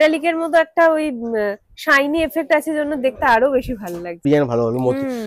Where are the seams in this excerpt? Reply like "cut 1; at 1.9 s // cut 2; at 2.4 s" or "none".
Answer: cut 1; at 4.2 s